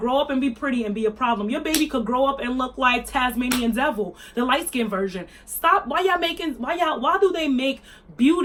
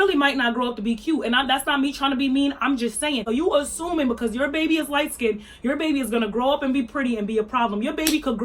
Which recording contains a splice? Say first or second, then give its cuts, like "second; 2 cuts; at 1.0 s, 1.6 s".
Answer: second; 1 cut; at 3.2 s